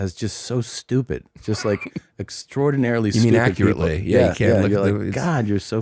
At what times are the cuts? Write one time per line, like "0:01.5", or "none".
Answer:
none